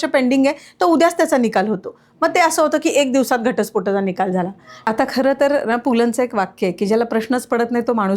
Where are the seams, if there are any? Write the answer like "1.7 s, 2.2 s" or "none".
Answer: 4.7 s